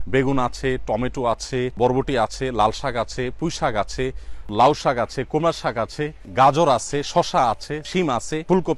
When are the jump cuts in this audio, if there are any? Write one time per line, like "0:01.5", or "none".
0:01.7
0:04.5
0:07.9

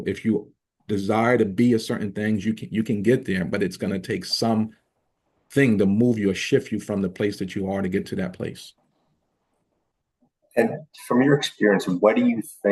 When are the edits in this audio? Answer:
none

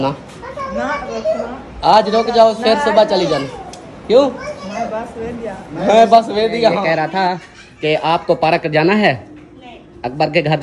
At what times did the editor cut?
0:06.8

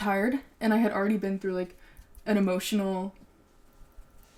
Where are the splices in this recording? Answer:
none

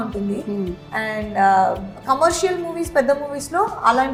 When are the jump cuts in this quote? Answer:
none

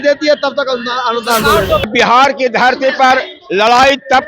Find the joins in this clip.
0:01.9

